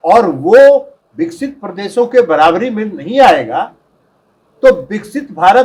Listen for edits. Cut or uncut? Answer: uncut